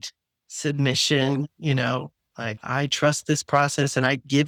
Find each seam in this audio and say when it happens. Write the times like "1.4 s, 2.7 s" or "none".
none